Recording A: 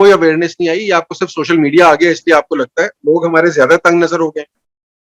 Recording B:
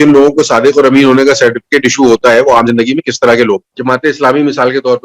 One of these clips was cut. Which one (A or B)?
B